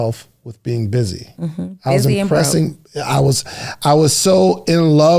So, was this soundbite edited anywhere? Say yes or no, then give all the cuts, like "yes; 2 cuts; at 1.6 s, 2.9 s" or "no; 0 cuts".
no; 0 cuts